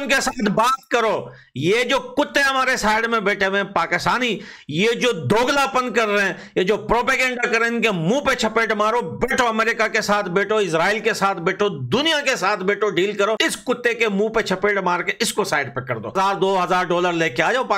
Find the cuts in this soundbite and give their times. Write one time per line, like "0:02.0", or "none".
0:13.4
0:16.1